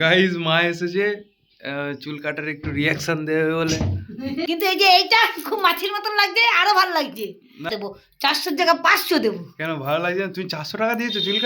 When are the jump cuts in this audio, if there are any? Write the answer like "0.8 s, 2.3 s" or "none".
4.4 s, 7.7 s